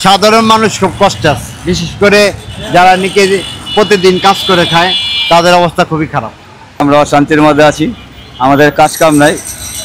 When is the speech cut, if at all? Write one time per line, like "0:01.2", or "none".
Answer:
0:06.8